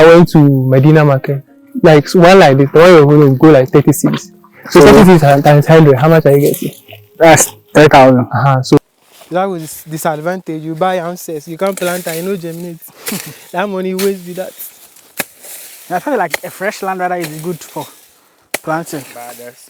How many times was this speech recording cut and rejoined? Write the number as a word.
one